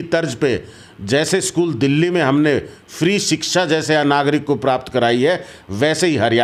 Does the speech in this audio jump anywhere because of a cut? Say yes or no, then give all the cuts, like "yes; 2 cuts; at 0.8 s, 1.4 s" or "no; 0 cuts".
no; 0 cuts